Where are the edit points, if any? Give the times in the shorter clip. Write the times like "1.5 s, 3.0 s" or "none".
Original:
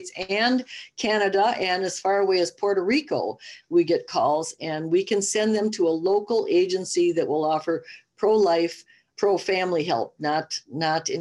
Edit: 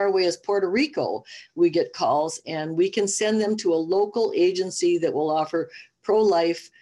none